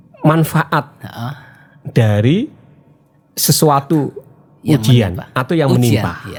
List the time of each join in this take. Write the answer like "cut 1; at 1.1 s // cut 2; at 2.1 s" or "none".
none